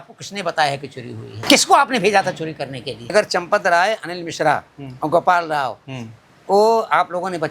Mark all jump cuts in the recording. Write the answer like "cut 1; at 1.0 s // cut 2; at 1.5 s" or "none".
cut 1; at 1.3 s // cut 2; at 3.1 s